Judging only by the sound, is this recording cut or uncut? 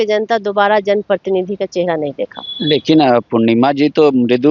uncut